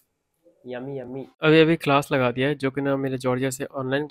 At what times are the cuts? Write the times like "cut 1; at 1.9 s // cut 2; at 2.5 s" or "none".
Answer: none